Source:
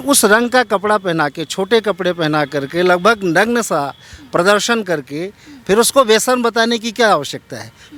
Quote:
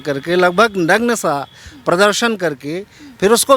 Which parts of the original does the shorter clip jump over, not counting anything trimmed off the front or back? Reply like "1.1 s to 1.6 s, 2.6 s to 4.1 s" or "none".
none